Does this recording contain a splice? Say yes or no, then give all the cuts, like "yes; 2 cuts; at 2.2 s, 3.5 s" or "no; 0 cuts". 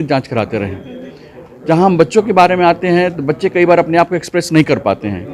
no; 0 cuts